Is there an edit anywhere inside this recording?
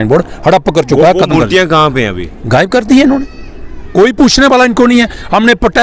no; 0 cuts

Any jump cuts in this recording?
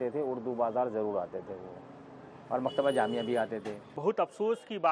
yes; 1 cut; at 4.0 s

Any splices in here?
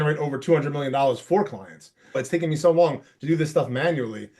yes; 1 cut; at 2.2 s

